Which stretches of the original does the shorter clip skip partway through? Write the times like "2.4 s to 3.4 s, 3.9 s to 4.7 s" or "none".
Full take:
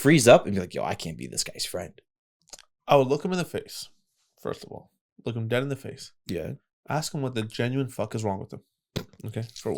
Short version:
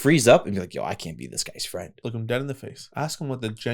1.9 s to 5.1 s, 6.0 s to 6.7 s